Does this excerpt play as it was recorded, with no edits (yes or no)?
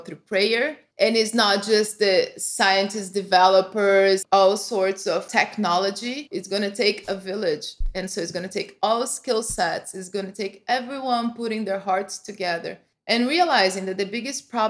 no